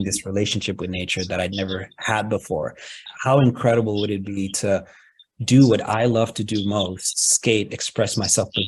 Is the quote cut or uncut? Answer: cut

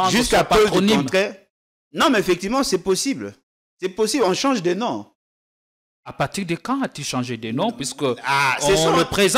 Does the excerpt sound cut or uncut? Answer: uncut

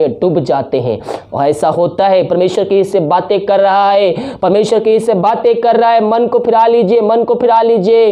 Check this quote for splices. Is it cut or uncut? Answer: uncut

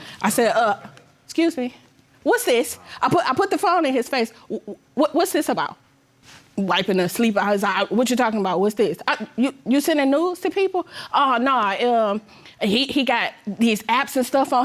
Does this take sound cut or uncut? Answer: uncut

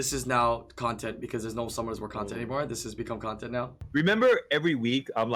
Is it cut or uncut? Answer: cut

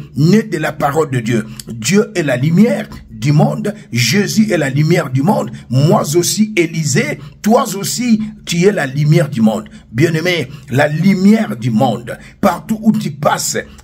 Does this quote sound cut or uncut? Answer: uncut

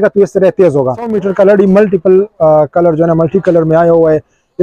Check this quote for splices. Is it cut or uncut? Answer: cut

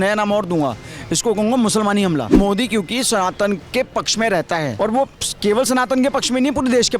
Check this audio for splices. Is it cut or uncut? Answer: cut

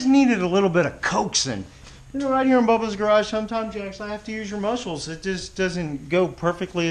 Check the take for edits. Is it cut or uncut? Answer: uncut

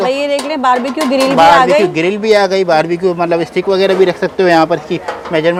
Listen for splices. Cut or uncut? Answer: uncut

